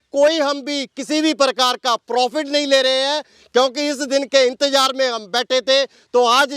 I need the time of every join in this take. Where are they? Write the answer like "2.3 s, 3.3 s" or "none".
none